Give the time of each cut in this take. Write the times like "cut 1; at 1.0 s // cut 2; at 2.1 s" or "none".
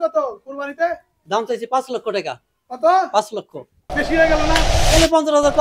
cut 1; at 4.7 s